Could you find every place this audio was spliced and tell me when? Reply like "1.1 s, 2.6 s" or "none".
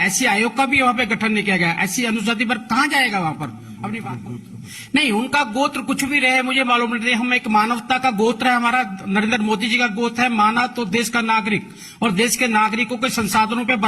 4.0 s